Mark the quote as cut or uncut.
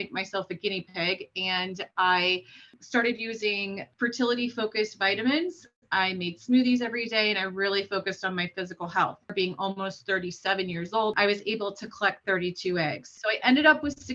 cut